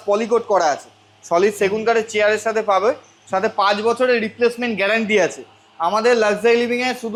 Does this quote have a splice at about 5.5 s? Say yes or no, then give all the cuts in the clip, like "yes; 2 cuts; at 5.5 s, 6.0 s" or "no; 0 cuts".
no; 0 cuts